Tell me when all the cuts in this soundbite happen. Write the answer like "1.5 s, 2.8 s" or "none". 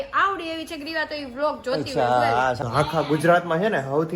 2.6 s